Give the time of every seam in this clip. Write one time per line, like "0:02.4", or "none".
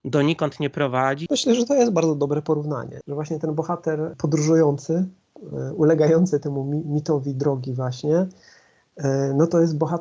0:01.2
0:02.9
0:04.1